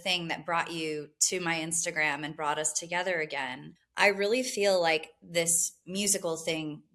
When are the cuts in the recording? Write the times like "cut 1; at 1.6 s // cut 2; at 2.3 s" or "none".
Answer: none